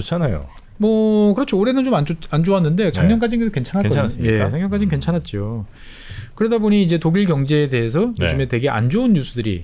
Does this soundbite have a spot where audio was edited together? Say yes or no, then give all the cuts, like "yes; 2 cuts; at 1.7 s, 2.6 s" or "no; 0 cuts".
no; 0 cuts